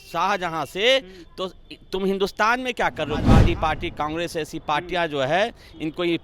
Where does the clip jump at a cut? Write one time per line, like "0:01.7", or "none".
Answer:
0:03.3